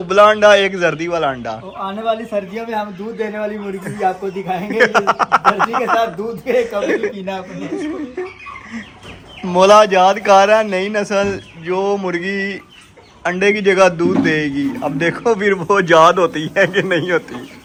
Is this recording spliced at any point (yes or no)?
no